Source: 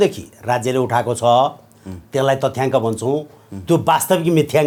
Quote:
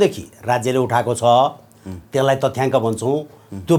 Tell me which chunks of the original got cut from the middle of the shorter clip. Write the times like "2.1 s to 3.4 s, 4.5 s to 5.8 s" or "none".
none